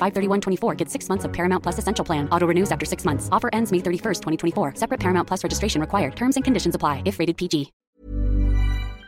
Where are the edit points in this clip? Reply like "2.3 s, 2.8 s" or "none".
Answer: 7.8 s